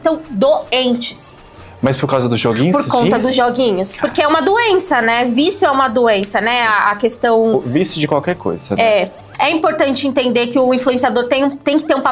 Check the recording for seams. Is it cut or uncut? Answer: cut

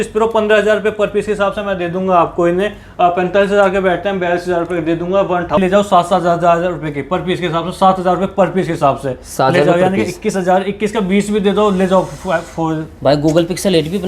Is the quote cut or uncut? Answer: cut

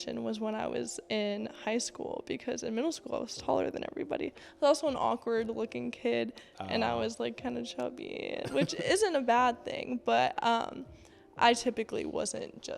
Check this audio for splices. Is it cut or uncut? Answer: uncut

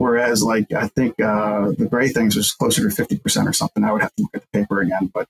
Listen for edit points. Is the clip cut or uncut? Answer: uncut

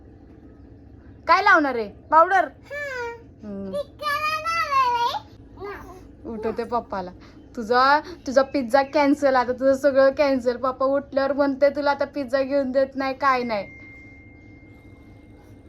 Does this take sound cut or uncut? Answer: cut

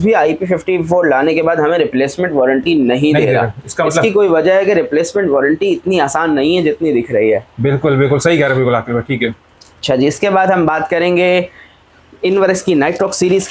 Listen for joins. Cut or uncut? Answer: uncut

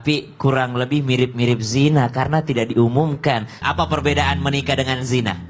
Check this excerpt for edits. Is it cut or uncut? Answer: cut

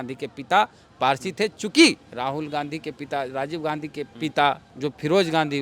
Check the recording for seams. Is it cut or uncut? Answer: cut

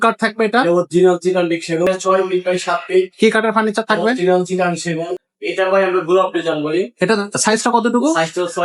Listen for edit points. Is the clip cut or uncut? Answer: cut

